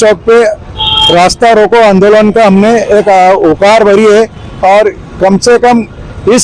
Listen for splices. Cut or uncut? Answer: uncut